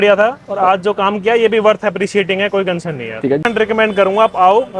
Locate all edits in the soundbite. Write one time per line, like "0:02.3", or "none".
0:03.4